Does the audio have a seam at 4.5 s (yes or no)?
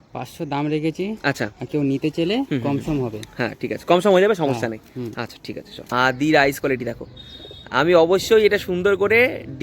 no